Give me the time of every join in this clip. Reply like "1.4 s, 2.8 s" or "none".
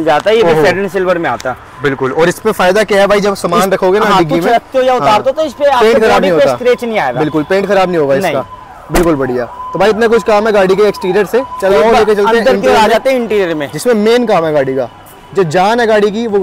none